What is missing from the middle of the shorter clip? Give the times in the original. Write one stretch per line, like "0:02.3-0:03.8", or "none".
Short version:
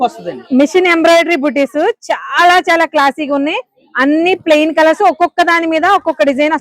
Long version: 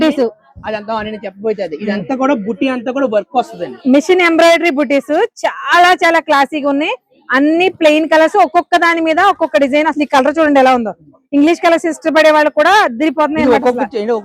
none